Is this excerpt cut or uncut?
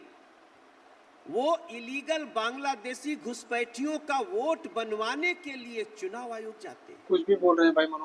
cut